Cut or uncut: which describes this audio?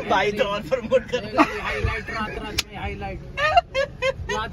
uncut